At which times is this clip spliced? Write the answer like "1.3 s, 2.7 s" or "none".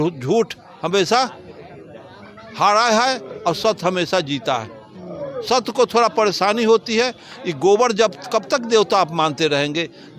none